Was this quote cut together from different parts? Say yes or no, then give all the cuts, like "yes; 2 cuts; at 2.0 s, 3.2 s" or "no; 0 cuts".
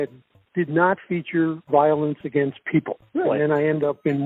yes; 1 cut; at 3.0 s